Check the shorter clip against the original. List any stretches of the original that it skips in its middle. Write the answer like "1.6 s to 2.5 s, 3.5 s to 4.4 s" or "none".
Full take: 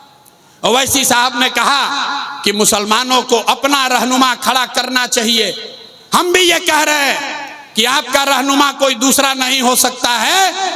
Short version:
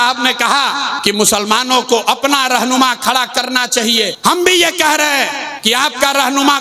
2.1 s to 2.4 s, 5.5 s to 6.0 s, 7.4 s to 7.6 s